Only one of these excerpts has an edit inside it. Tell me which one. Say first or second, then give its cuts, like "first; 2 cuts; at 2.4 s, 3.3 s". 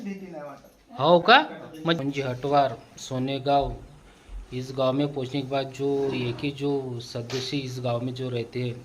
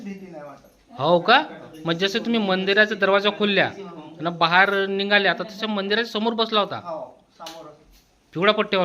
first; 1 cut; at 2.0 s